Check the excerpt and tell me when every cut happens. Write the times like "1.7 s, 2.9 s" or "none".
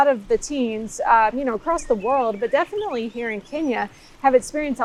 none